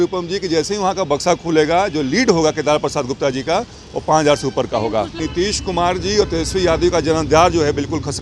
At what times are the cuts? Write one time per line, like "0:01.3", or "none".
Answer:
0:05.2